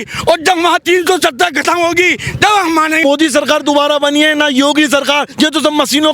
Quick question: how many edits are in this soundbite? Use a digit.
1